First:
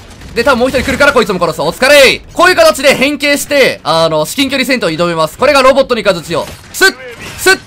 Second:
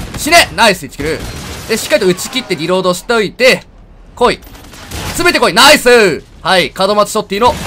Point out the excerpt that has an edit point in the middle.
first; 2 cuts; at 2.2 s, 6.6 s

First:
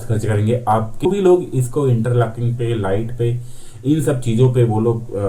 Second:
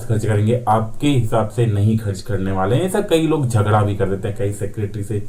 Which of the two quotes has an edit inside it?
first; 1 cut; at 1.0 s

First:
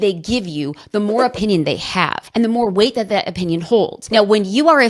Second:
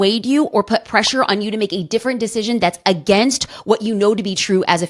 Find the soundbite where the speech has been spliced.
first; 2 cuts; at 2.2 s, 4.0 s

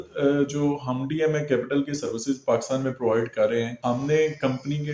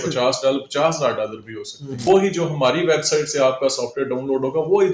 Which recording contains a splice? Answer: second; 1 cut; at 1.9 s

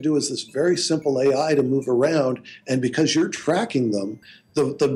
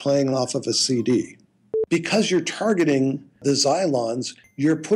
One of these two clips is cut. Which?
second; 2 cuts; at 1.7 s, 3.4 s

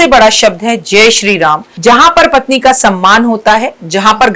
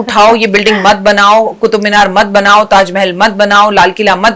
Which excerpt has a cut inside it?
first; 1 cut; at 1.7 s

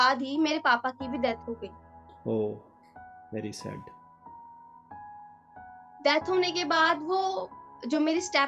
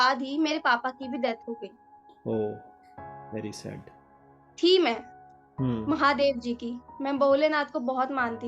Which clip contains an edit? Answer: second; 1 cut; at 4.4 s

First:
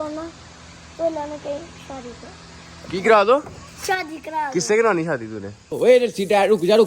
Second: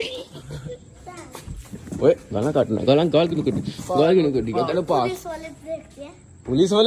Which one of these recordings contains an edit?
first; 1 cut; at 5.7 s

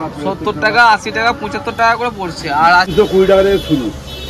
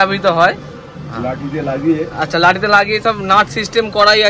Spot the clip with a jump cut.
first; 1 cut; at 2.9 s

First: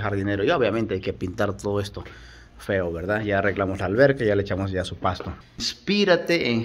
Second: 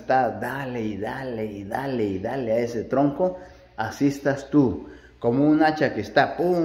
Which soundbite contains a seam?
first; 1 cut; at 5.7 s

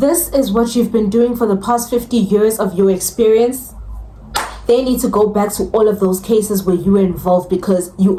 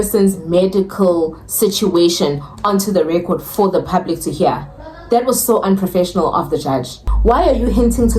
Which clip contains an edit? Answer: second; 1 cut; at 7.0 s

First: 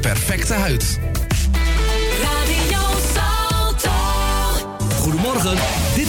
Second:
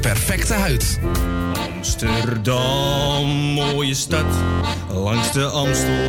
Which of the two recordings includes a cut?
second; 1 cut; at 1.0 s

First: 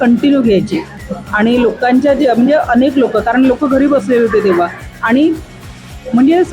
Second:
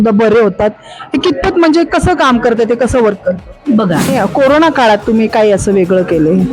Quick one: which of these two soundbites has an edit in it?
second; 1 cut; at 4.1 s

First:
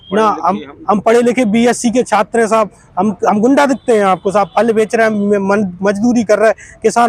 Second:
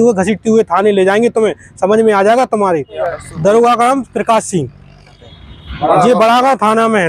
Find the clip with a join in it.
second; 2 cuts; at 3.0 s, 5.1 s

